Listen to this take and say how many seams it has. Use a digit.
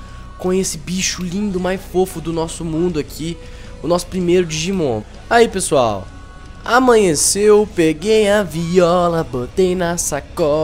1